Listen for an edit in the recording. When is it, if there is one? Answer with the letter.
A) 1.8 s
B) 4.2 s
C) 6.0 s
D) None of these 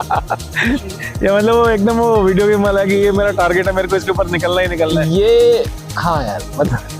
D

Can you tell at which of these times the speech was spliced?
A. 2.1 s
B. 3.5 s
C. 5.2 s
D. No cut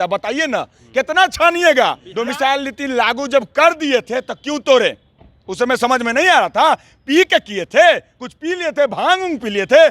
A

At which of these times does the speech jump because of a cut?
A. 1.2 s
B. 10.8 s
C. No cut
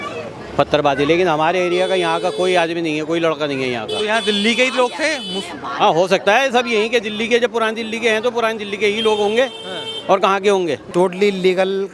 B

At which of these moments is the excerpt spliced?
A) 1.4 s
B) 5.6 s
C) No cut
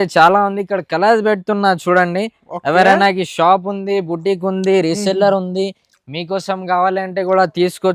C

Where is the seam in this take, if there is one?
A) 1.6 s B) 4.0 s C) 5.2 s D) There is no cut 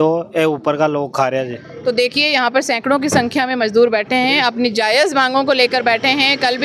A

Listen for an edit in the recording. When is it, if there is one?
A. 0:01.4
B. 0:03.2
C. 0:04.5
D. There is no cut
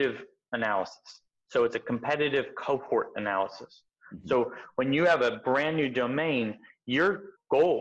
D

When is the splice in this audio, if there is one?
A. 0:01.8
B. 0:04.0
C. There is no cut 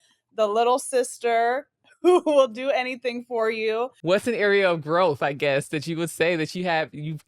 B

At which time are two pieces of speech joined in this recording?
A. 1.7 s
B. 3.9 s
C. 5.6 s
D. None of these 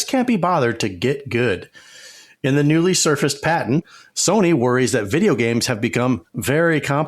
B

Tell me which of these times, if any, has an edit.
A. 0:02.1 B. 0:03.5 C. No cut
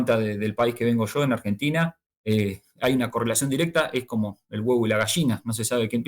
A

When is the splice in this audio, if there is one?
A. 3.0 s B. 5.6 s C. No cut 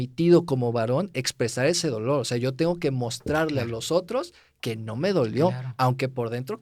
C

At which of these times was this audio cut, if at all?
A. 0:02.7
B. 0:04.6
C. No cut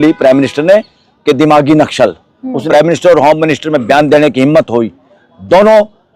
A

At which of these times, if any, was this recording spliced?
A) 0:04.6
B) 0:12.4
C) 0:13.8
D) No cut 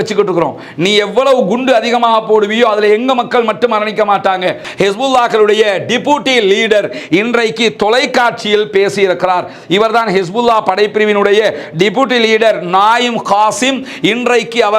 A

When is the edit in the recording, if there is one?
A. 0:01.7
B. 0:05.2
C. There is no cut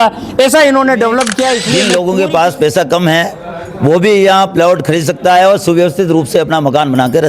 A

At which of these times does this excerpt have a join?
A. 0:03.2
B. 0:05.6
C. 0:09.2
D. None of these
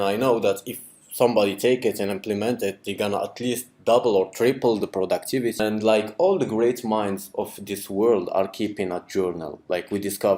B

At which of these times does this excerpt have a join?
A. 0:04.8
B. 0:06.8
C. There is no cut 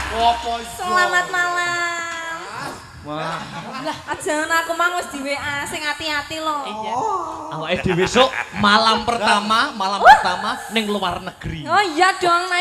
B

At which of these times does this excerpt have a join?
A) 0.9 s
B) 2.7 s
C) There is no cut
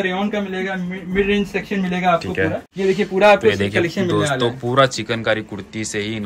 B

